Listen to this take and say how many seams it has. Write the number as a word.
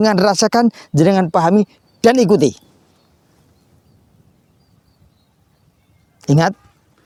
zero